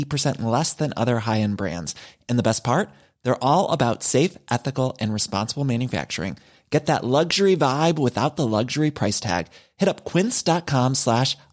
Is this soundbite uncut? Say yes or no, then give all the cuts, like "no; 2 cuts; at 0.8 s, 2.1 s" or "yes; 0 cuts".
yes; 0 cuts